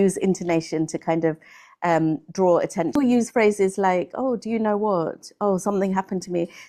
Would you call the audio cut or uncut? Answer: cut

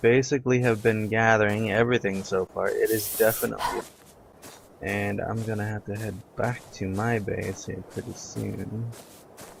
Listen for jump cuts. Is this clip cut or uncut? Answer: uncut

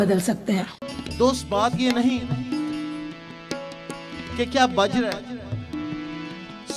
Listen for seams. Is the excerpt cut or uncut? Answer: cut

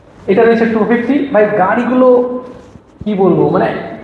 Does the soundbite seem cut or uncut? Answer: uncut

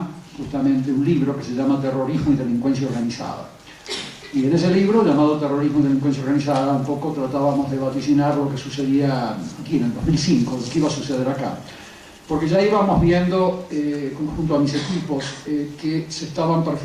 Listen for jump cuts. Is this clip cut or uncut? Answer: cut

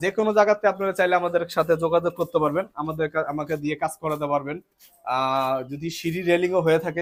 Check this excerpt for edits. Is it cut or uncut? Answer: uncut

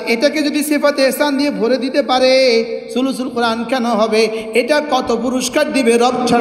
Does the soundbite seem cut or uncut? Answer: uncut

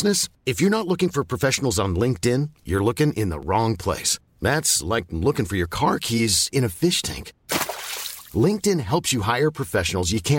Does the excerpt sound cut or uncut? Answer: uncut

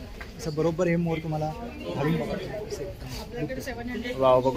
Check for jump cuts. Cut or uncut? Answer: uncut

